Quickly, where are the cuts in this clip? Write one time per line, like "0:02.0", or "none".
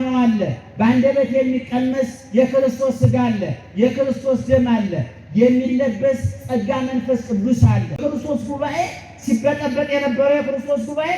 0:08.0